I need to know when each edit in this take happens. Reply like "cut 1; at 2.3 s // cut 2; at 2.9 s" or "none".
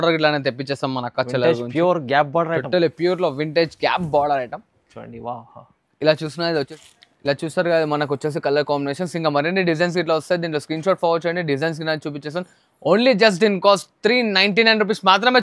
cut 1; at 6.7 s